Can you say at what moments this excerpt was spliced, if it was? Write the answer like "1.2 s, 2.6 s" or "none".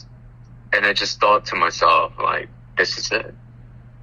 none